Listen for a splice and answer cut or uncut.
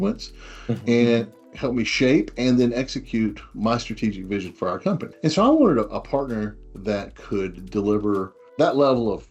cut